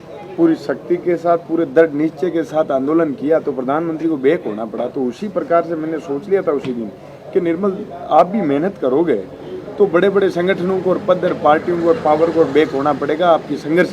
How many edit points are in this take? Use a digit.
0